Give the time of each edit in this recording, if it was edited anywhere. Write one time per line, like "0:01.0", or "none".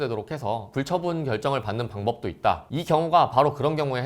0:02.6